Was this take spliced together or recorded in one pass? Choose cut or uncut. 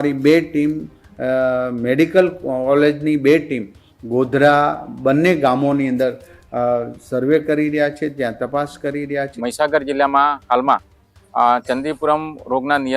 cut